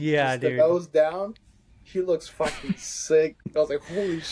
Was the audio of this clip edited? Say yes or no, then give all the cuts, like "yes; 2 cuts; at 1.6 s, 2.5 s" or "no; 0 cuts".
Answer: yes; 1 cut; at 3.4 s